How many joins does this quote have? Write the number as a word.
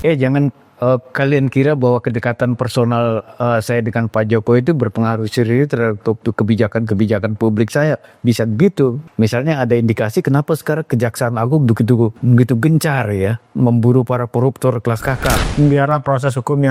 three